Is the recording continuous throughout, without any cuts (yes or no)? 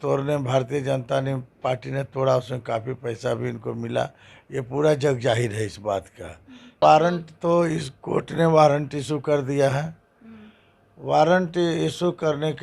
no